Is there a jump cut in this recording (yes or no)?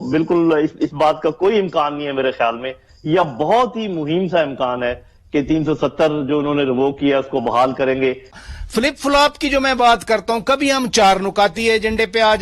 yes